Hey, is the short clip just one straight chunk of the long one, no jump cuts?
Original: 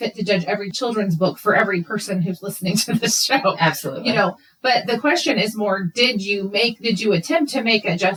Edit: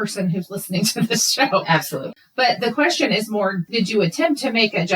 no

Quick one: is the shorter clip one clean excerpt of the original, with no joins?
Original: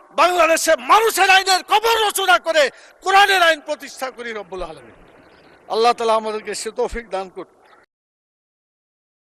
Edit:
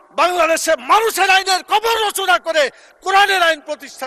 yes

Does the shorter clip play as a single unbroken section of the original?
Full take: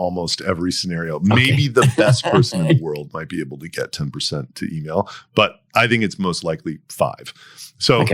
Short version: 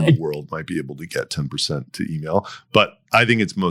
yes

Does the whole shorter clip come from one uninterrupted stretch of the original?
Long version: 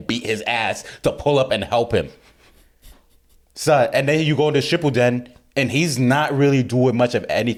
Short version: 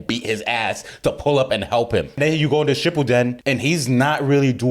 no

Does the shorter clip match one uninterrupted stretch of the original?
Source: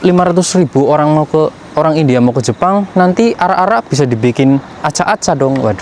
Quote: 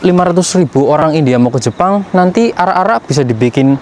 no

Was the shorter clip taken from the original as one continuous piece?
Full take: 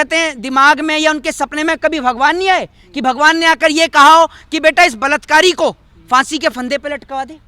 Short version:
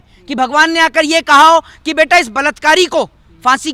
yes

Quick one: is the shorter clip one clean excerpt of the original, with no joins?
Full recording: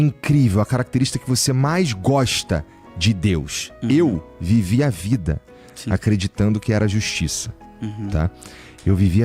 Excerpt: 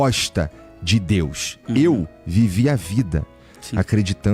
yes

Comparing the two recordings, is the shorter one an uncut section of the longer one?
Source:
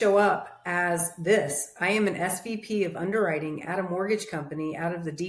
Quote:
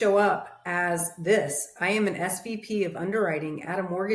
yes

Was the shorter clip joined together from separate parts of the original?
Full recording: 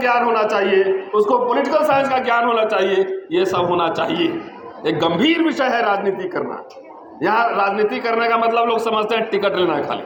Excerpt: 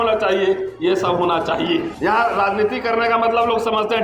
yes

